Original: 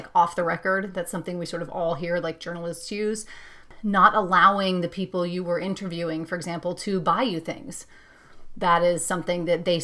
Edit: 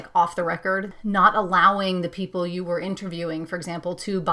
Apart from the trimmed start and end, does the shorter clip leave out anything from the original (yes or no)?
yes